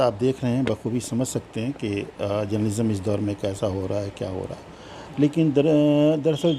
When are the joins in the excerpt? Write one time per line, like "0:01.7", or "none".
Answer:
none